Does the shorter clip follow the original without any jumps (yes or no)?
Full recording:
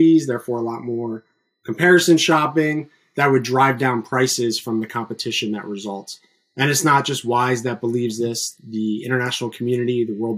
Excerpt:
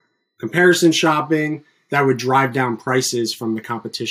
yes